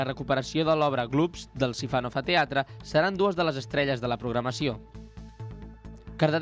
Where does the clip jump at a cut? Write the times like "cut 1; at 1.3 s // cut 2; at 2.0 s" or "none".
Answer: none